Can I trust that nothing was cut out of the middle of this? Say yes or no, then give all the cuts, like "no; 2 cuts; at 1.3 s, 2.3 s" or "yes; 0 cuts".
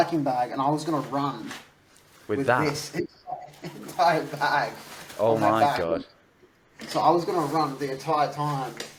yes; 0 cuts